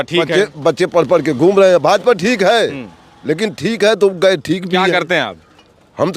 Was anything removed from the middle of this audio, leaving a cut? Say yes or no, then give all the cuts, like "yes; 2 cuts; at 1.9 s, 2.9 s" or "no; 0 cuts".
no; 0 cuts